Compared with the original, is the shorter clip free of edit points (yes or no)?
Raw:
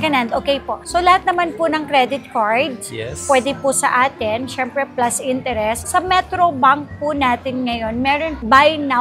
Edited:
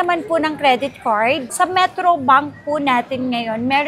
no